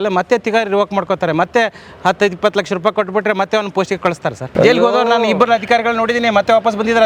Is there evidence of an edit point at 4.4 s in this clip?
yes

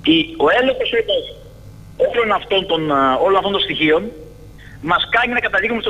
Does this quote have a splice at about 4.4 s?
no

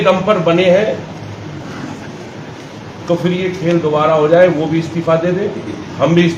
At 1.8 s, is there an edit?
no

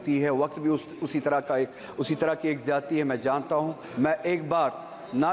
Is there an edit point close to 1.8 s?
no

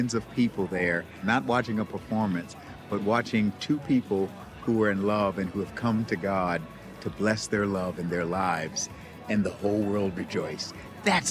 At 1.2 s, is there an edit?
yes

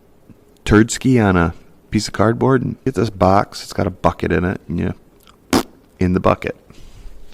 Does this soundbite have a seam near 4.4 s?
no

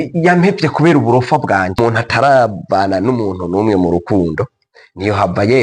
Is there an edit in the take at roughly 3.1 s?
no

